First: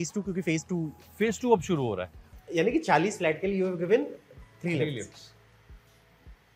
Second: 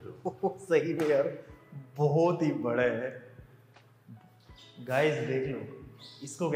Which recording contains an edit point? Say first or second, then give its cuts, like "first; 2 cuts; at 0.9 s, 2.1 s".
first; 1 cut; at 2.2 s